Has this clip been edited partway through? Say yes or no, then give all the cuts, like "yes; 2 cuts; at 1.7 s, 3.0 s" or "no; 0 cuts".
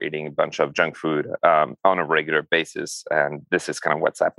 no; 0 cuts